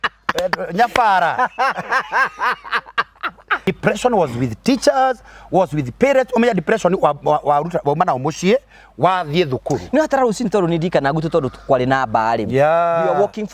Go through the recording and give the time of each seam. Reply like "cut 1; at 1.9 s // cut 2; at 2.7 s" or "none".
cut 1; at 3.7 s